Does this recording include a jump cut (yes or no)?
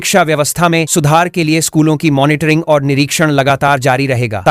no